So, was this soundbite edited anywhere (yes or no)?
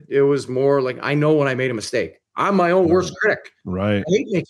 no